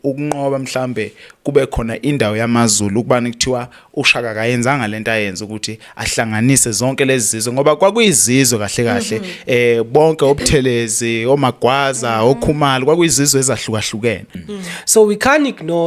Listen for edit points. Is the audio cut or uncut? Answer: cut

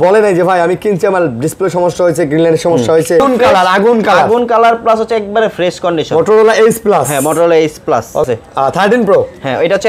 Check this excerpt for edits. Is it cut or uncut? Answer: cut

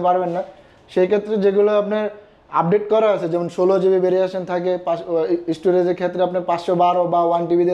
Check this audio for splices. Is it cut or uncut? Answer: uncut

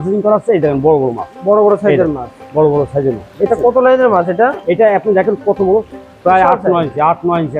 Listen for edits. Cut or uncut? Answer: uncut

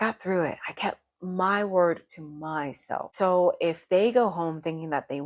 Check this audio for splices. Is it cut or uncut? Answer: cut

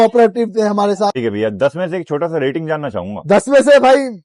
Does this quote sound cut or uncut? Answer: cut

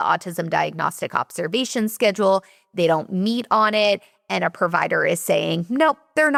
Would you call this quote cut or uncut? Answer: uncut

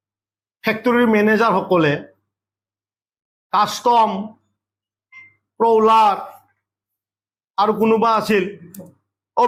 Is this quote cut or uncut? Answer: uncut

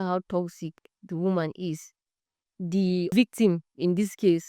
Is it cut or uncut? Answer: cut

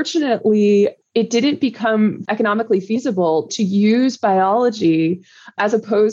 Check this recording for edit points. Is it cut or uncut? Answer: cut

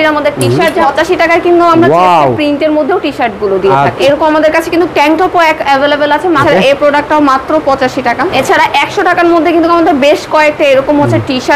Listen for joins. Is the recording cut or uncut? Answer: cut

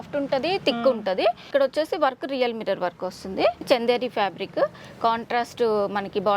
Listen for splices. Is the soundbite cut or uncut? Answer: cut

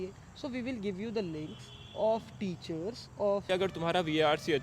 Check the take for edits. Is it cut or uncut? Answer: cut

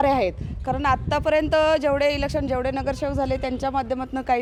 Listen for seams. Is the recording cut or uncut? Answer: uncut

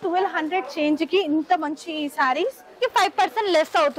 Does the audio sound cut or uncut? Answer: cut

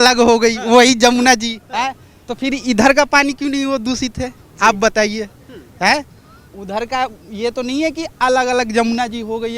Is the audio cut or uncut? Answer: uncut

